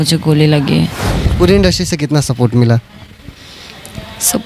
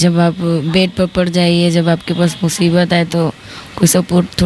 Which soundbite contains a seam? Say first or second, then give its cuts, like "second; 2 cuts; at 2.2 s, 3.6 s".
first; 1 cut; at 1.2 s